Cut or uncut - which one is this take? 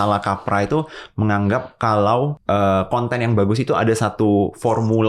cut